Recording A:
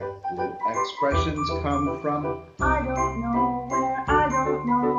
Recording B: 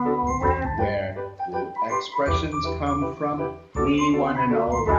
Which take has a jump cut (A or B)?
B